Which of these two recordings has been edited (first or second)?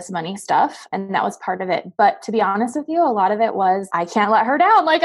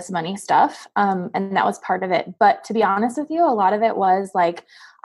first